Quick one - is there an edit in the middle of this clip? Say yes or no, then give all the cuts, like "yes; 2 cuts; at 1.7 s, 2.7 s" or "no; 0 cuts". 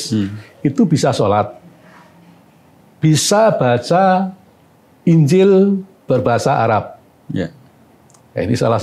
no; 0 cuts